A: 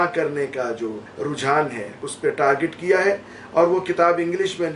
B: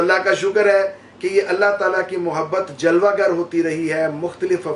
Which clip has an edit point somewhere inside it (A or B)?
A